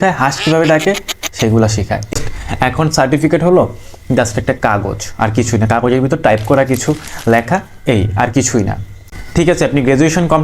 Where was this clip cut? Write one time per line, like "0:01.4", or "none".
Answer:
0:02.1
0:09.1